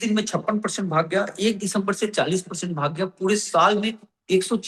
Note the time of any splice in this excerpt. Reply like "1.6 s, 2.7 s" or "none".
none